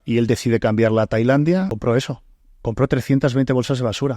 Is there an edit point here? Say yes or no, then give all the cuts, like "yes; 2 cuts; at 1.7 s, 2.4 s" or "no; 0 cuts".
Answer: yes; 1 cut; at 1.8 s